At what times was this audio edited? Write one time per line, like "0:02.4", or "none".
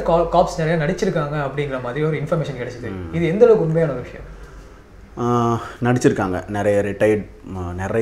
none